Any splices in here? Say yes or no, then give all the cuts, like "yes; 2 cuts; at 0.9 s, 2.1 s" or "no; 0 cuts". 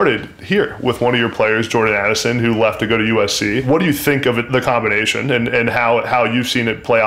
yes; 1 cut; at 3.6 s